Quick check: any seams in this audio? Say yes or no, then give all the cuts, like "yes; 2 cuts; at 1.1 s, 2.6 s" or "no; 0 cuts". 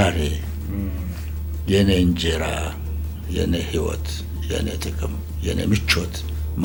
no; 0 cuts